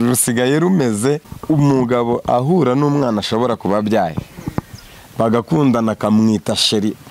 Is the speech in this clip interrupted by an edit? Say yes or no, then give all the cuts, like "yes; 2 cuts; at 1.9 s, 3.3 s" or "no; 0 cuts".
yes; 1 cut; at 1.3 s